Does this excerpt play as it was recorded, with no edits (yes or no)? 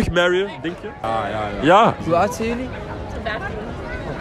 no